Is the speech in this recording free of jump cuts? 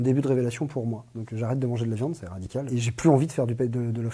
no; 2 cuts; at 1.2 s, 2.7 s

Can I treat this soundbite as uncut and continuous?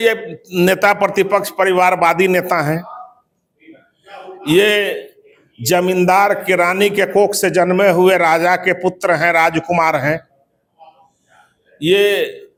yes; 0 cuts

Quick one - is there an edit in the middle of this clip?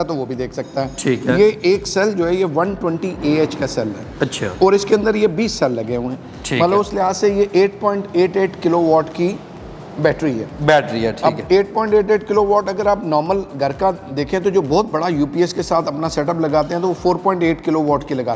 no; 0 cuts

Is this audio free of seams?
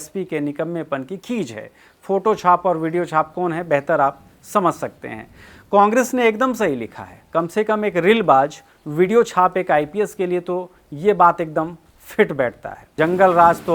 no; 1 cut; at 12.8 s

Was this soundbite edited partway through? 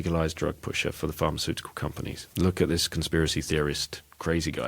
yes; 1 cut; at 2.2 s

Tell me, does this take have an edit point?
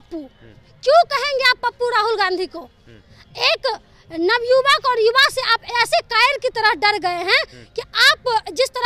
no; 0 cuts

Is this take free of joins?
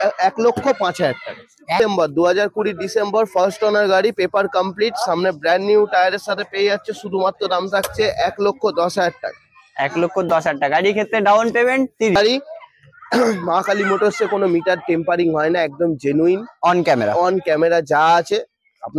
no; 2 cuts; at 1.8 s, 12.2 s

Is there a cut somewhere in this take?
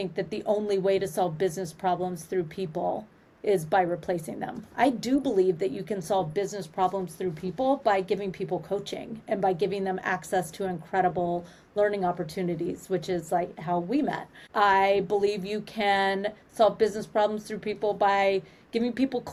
no; 0 cuts

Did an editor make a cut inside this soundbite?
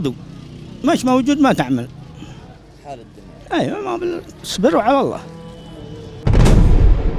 no; 0 cuts

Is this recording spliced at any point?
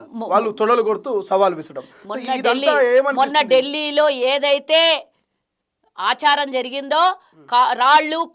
no; 0 cuts

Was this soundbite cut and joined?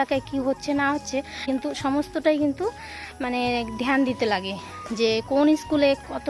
yes; 1 cut; at 1.4 s

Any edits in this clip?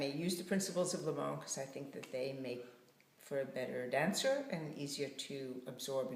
no; 0 cuts

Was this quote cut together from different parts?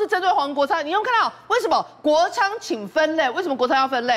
no; 0 cuts

